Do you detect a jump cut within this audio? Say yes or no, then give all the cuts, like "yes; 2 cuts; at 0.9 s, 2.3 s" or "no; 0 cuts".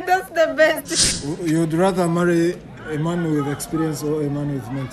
yes; 1 cut; at 1.1 s